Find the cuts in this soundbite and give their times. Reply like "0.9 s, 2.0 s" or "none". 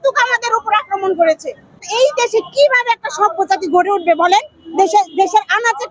1.8 s